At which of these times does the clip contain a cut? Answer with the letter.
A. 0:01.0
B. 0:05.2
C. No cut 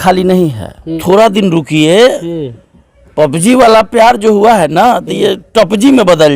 A